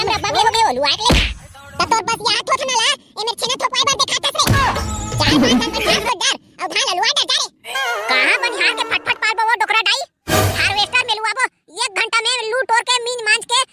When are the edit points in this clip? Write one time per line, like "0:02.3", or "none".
none